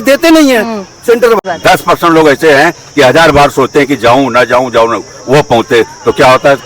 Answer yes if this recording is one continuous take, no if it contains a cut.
no